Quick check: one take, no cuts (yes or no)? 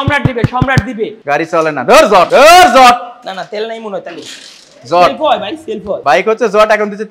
no